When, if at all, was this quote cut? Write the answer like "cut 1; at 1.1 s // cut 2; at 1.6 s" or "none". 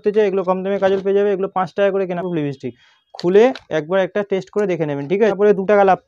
cut 1; at 2.2 s // cut 2; at 5.3 s